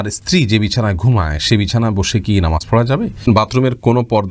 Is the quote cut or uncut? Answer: cut